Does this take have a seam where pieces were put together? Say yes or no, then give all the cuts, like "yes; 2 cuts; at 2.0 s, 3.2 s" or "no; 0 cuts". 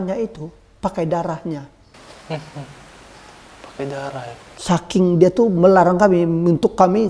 no; 0 cuts